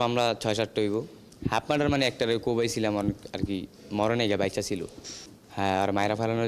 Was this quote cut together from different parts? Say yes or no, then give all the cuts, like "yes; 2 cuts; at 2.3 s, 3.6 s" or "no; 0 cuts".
no; 0 cuts